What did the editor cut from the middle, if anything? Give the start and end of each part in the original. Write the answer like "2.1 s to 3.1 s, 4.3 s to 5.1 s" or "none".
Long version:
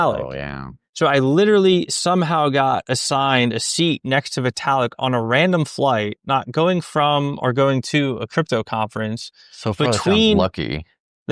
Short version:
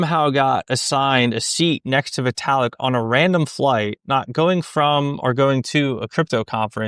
none